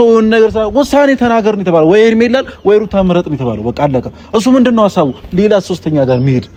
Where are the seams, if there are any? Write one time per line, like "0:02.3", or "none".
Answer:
none